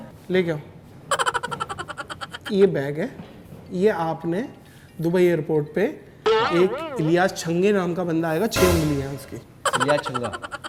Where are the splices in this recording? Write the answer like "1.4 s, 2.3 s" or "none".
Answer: none